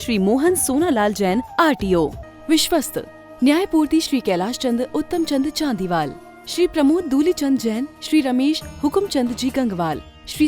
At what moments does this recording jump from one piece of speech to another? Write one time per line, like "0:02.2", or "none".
0:02.2